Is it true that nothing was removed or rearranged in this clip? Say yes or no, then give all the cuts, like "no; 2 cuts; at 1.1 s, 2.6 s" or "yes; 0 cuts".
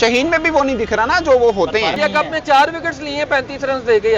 no; 1 cut; at 1.9 s